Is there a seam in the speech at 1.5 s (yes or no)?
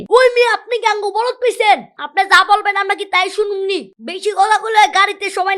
no